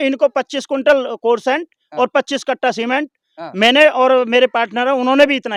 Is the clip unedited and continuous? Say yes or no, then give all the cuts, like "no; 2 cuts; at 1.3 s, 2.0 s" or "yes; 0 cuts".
yes; 0 cuts